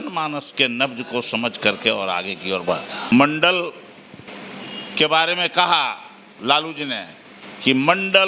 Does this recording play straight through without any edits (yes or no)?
no